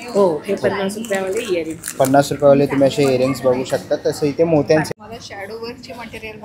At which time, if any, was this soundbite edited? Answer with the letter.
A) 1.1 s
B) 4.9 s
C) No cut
B